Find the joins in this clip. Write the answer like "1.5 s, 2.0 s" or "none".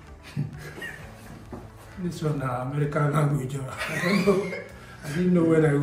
1.8 s